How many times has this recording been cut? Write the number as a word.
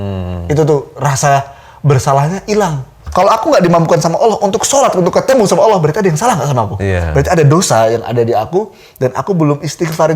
one